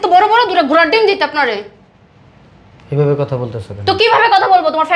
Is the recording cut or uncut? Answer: uncut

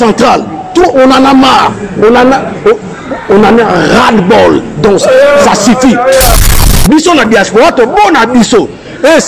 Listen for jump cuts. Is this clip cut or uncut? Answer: cut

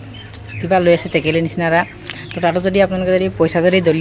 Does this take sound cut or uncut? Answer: uncut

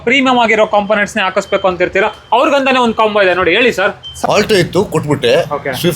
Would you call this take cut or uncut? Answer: cut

